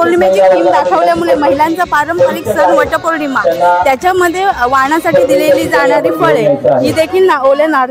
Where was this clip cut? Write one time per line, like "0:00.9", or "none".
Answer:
none